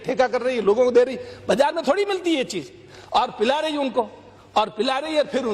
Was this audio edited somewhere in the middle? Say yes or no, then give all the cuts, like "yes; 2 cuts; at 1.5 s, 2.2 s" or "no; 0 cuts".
no; 0 cuts